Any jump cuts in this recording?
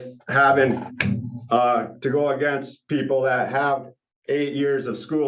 no; 0 cuts

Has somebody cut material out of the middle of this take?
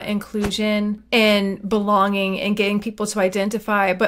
yes; 1 cut; at 1.0 s

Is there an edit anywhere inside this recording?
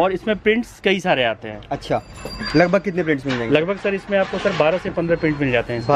no; 0 cuts

